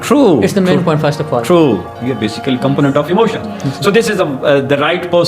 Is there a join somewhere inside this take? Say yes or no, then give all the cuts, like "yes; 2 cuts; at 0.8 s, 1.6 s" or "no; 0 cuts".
yes; 1 cut; at 1.9 s